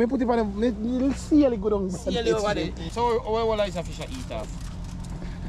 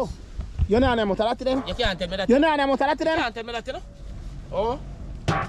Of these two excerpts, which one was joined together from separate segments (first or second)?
first